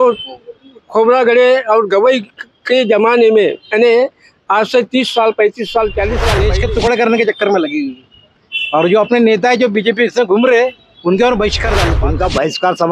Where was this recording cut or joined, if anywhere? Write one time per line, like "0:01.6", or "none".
0:06.3
0:11.9